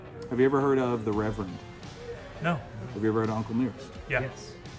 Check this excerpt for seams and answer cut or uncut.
uncut